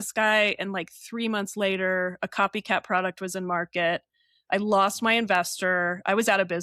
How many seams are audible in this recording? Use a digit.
0